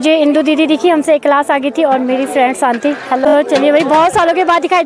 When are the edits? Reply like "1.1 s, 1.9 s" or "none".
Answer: 3.2 s